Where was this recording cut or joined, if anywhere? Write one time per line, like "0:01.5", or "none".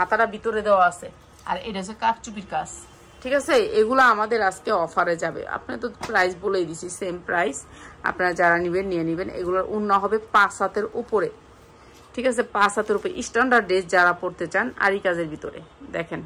none